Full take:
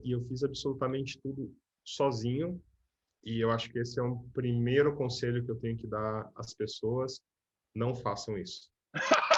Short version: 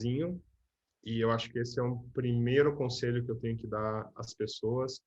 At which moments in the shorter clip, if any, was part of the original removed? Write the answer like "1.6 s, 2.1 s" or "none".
none